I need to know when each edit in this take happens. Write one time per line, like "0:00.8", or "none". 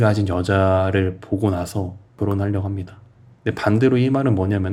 none